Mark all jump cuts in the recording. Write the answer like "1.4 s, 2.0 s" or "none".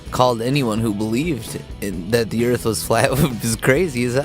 2.3 s